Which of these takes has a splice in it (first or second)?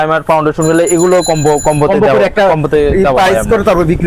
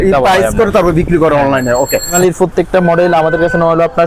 second